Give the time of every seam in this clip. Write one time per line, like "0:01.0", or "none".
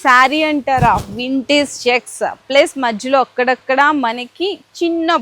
none